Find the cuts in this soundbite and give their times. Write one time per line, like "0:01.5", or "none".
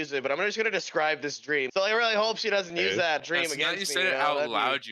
0:01.7
0:03.2